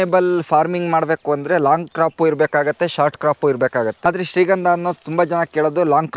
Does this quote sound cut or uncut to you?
cut